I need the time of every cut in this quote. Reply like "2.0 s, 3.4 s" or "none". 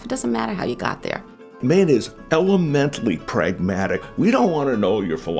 1.6 s, 2.1 s, 4.1 s